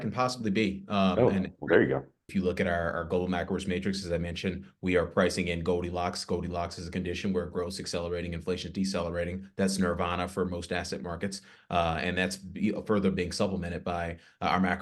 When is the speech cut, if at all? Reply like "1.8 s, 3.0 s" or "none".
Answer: 2.2 s